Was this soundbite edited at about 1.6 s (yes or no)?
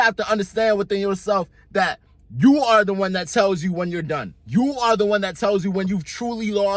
no